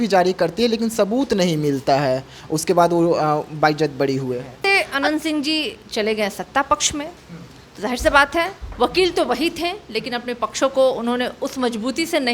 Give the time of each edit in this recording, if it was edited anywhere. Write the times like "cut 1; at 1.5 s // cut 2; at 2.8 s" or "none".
cut 1; at 4.7 s